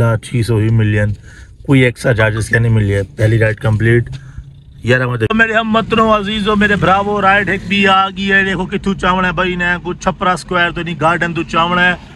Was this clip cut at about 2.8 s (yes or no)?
no